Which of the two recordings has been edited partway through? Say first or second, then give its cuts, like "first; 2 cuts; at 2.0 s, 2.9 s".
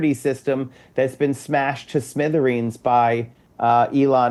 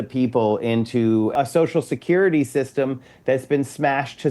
second; 1 cut; at 1.3 s